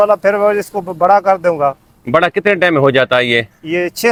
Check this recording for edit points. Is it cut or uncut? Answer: uncut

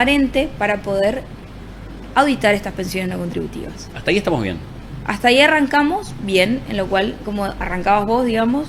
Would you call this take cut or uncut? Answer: uncut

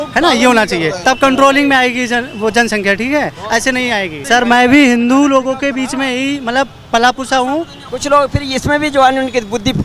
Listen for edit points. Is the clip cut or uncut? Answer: cut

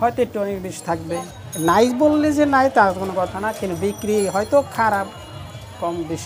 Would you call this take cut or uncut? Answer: uncut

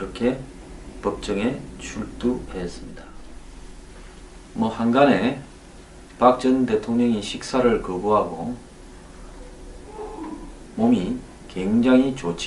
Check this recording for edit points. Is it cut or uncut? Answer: uncut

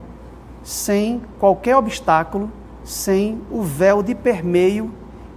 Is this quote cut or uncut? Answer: uncut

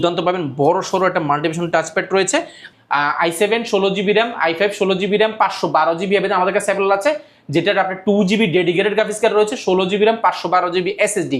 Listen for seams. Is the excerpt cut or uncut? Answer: cut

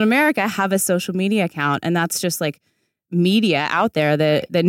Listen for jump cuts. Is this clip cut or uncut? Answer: uncut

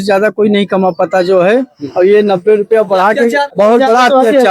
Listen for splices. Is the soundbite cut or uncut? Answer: uncut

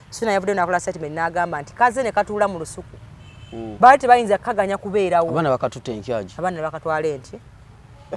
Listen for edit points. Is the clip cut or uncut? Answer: uncut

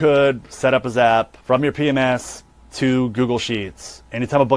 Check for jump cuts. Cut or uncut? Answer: cut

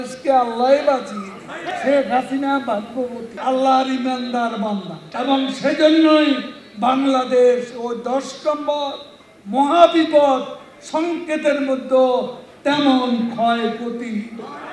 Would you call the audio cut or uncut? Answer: cut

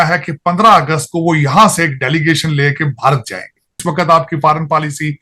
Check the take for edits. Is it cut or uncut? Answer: cut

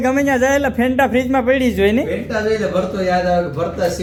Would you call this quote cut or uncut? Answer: uncut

